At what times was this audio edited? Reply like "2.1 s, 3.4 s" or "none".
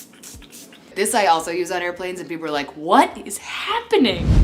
0.9 s

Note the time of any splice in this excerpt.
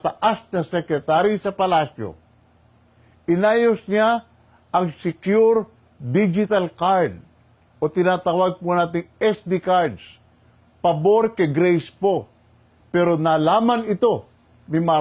none

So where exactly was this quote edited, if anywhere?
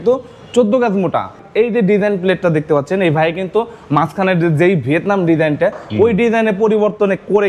1.4 s

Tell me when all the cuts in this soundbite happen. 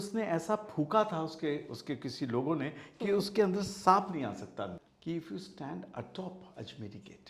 4.9 s

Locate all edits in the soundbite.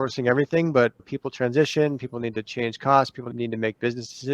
3.3 s

